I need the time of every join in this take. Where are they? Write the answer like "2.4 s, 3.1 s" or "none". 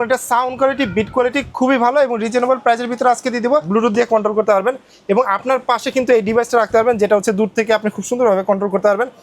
3.7 s